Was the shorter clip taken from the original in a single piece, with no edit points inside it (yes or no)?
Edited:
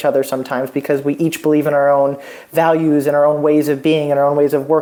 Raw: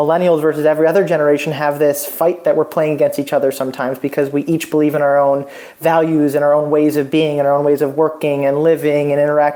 yes